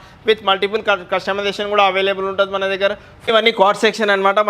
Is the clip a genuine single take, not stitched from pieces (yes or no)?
no